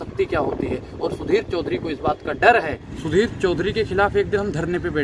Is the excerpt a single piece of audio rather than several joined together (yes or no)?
no